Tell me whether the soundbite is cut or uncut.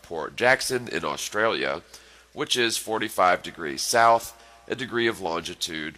uncut